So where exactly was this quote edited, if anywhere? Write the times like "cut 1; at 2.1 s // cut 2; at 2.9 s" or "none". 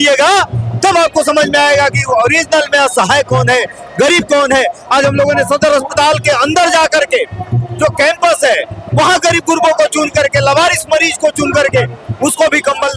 none